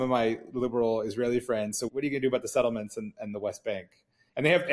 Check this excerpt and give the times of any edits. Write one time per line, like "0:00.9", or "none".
0:01.8